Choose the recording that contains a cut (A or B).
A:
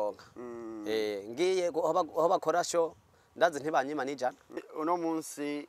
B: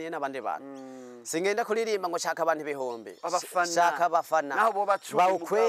A